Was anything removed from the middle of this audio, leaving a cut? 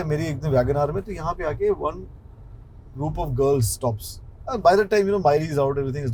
no; 0 cuts

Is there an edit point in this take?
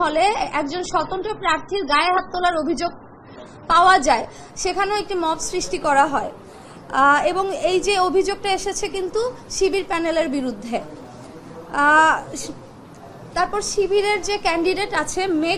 no; 0 cuts

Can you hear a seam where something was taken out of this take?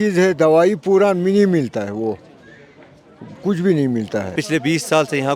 yes; 1 cut; at 4.3 s

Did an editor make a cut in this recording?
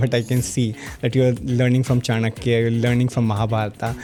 no; 0 cuts

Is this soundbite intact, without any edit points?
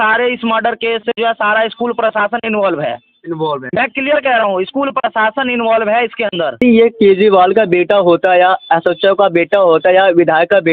no; 1 cut; at 6.6 s

